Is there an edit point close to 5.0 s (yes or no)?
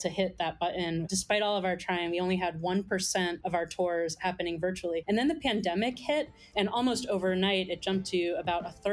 yes